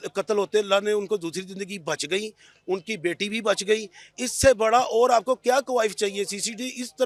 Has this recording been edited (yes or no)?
no